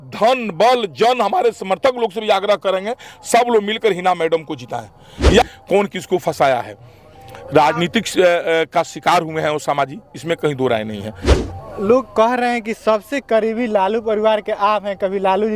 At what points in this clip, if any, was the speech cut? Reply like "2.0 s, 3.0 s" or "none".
5.4 s

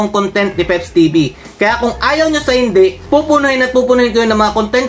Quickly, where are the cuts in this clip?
none

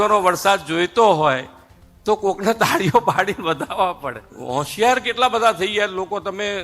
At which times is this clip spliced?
4.3 s

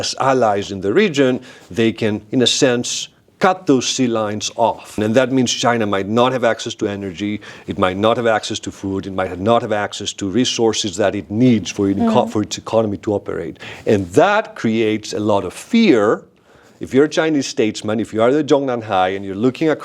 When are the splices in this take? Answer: 5.0 s, 13.7 s

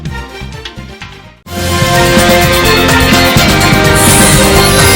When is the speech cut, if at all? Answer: 1.3 s

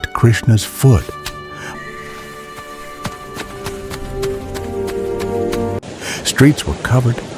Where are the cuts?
5.8 s

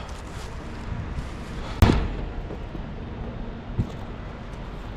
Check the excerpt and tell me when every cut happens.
none

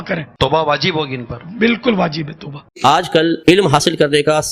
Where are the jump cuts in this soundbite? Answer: 2.7 s

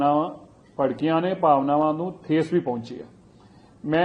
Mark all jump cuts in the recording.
none

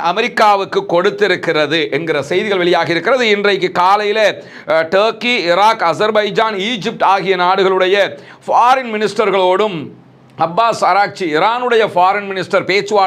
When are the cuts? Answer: none

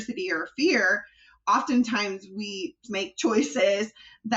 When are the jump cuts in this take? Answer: 2.9 s

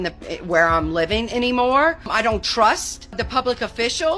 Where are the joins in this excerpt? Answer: 2.1 s, 3.2 s

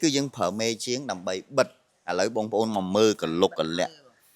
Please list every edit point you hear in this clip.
none

